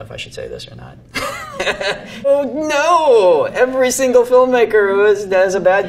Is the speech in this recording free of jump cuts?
no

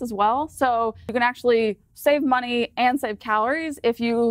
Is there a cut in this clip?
yes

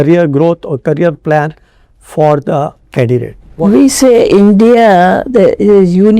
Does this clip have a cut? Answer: yes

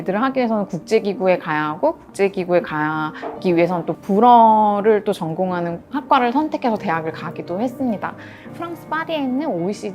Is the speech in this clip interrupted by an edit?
yes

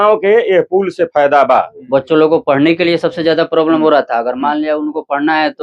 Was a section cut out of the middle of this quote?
yes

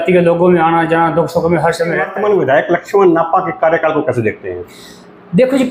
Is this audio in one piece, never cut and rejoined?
no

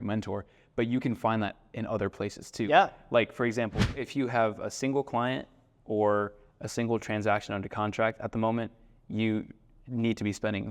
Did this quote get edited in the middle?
yes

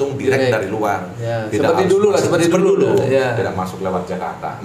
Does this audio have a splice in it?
no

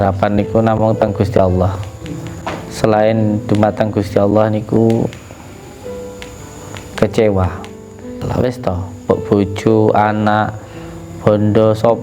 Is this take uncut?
no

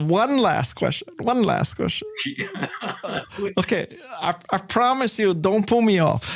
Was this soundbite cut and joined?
no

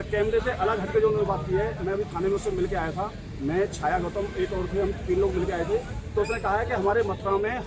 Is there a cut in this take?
no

